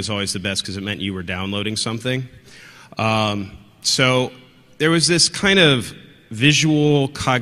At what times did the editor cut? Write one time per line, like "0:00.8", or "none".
0:04.1

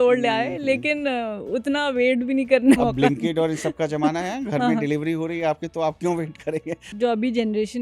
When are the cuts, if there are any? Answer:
0:02.8
0:06.8

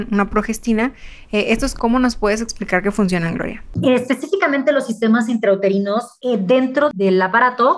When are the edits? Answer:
0:01.7
0:03.7
0:06.1
0:06.9

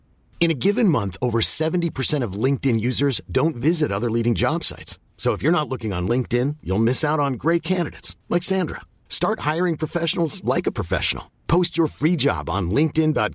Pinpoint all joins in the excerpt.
none

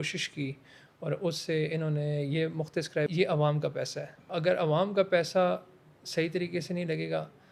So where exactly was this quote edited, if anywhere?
0:03.1
0:04.3

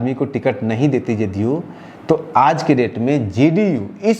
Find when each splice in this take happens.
none

